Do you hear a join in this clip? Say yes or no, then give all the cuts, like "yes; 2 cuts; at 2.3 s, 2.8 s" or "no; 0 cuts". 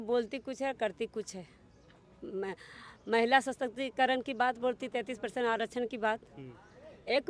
no; 0 cuts